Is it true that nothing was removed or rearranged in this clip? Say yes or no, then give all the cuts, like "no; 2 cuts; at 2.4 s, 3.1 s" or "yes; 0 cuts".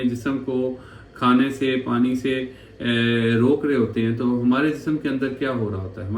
yes; 0 cuts